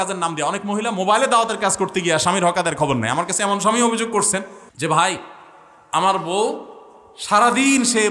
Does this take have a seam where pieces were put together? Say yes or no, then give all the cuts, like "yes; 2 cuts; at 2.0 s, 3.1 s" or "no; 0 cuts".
yes; 1 cut; at 4.6 s